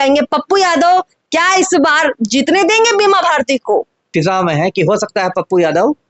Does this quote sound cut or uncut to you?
cut